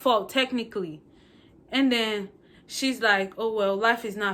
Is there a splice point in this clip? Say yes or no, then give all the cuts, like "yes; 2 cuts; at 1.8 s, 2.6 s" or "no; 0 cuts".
no; 0 cuts